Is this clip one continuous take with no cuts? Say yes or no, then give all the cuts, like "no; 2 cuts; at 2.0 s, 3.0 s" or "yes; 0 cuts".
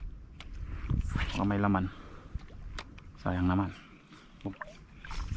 no; 1 cut; at 4.3 s